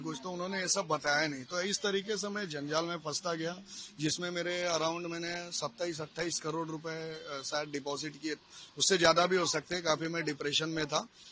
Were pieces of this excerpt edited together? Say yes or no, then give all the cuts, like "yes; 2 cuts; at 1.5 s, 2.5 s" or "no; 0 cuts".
no; 0 cuts